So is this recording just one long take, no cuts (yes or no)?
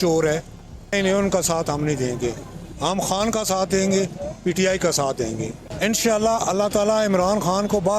no